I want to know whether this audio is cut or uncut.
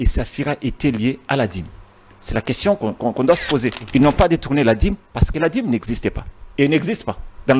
cut